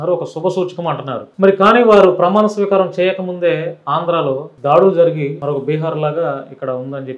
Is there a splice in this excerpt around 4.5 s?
yes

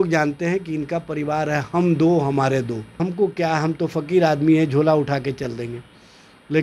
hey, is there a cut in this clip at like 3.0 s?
yes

